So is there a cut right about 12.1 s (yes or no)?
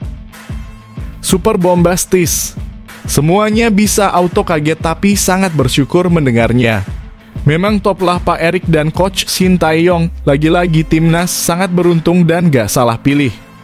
no